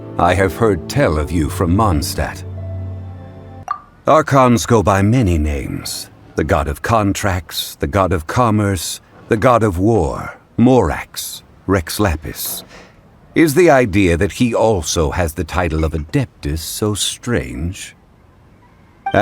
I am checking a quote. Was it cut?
yes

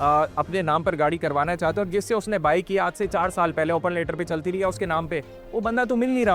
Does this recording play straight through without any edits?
yes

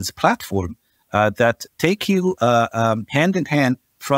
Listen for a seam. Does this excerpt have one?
no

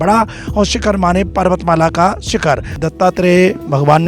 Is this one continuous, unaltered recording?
no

